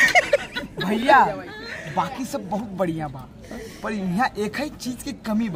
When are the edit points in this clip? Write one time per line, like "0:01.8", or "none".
none